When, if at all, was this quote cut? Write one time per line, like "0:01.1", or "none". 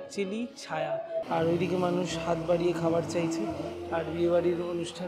0:01.2